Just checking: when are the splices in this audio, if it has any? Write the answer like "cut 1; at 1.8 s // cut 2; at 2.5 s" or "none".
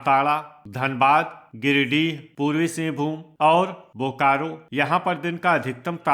cut 1; at 2.2 s // cut 2; at 3.3 s // cut 3; at 4.6 s